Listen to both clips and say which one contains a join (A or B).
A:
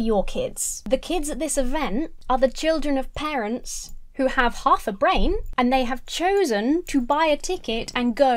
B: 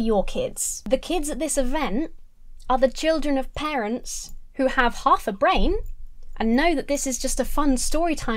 A